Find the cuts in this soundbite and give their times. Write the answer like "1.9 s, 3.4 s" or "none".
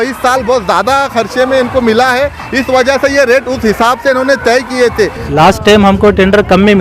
5.2 s

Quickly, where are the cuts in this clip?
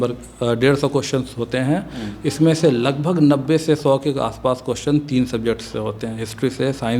none

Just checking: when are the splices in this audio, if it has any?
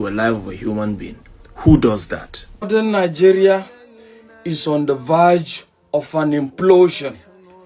2.7 s

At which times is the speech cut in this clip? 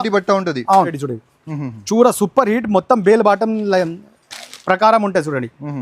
1.1 s

